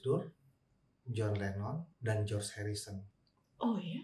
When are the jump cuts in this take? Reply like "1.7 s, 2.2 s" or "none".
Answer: 3.1 s